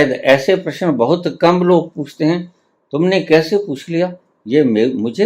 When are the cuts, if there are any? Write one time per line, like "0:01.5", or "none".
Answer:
none